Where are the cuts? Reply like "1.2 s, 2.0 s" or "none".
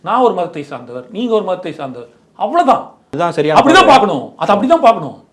3.2 s